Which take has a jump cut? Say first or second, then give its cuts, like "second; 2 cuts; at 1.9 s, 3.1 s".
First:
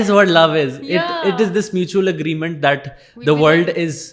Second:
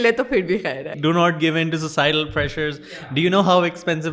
second; 1 cut; at 0.9 s